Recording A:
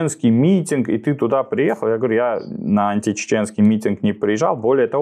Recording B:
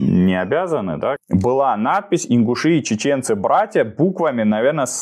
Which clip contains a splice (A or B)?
B